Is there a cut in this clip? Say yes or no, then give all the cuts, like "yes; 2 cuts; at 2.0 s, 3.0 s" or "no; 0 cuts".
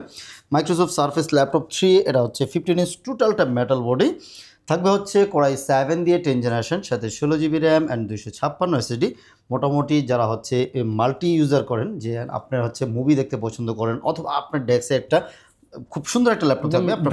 no; 0 cuts